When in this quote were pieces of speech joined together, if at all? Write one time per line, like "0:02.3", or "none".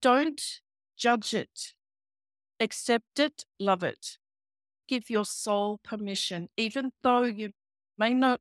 0:04.8